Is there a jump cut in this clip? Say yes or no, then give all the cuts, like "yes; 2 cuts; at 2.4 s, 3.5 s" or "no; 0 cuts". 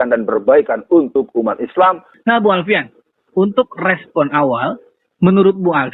yes; 1 cut; at 2.1 s